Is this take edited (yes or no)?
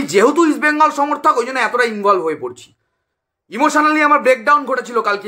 no